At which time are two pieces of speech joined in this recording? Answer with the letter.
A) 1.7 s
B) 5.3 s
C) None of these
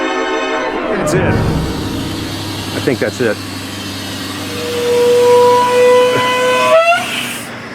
A